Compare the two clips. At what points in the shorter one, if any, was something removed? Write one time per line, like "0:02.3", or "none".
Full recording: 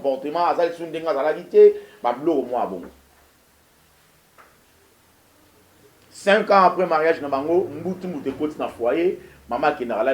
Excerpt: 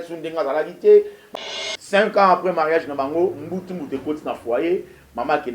0:01.2